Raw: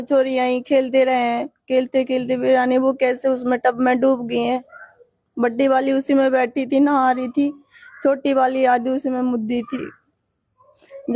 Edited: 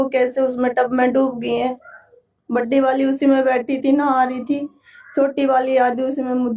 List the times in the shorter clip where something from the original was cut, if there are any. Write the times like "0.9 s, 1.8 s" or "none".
none